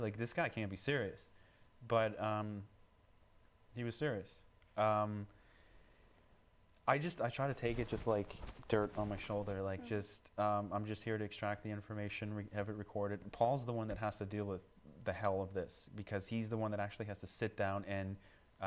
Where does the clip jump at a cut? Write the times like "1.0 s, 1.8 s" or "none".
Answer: none